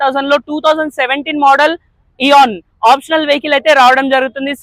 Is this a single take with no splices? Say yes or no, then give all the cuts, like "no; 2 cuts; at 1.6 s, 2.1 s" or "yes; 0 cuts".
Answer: yes; 0 cuts